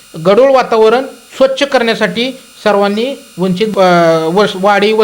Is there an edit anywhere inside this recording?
yes; 1 cut; at 3.7 s

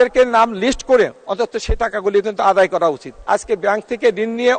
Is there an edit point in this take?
yes; 1 cut; at 3.1 s

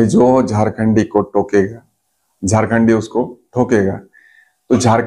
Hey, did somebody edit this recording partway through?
no; 0 cuts

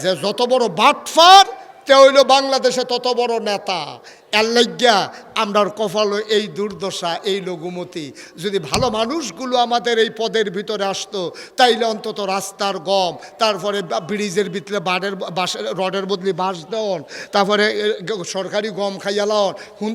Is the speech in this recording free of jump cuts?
yes; 0 cuts

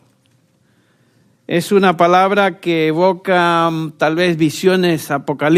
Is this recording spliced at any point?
no; 0 cuts

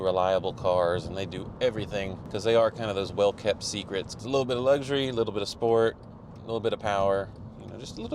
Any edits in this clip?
yes; 2 cuts; at 2.2 s, 4.1 s

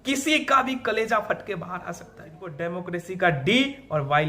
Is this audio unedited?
no; 1 cut; at 2.6 s

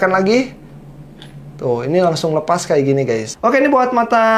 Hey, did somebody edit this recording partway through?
yes; 1 cut; at 3.3 s

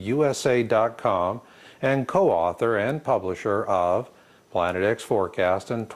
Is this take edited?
yes; 1 cut; at 4.2 s

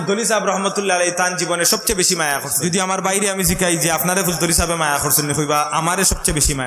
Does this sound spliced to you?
yes; 1 cut; at 2.5 s

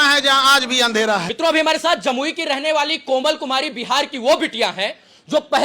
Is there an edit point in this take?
no; 0 cuts

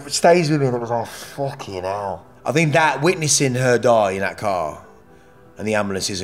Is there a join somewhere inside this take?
yes; 1 cut; at 2.3 s

